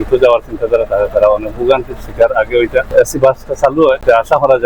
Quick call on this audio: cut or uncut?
cut